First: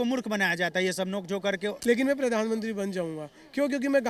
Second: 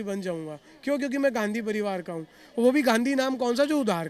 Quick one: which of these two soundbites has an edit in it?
first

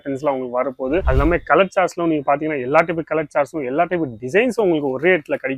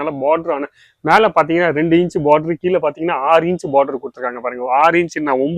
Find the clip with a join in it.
first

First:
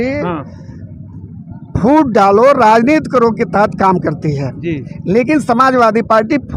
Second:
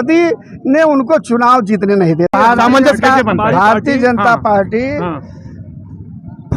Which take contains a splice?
second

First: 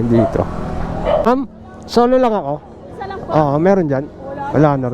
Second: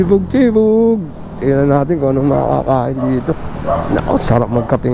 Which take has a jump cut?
first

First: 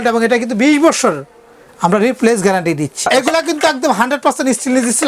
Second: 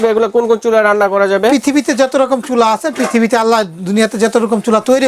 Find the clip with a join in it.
first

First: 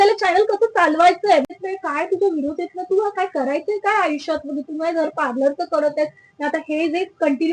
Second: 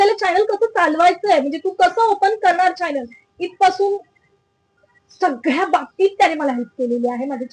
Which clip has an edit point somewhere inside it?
first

